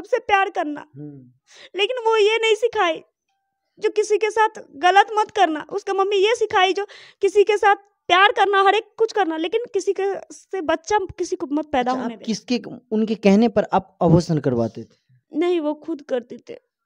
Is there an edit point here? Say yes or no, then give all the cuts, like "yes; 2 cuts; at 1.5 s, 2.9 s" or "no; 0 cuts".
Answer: no; 0 cuts